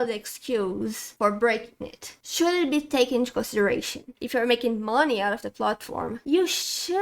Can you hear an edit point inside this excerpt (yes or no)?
yes